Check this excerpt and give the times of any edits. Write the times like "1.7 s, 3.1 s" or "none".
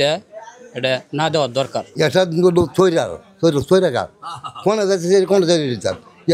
1.9 s